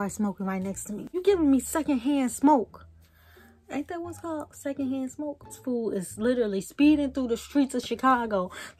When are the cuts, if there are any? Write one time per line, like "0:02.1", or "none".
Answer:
0:01.2
0:05.6